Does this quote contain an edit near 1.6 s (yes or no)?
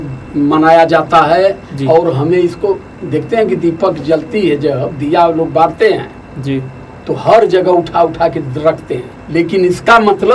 no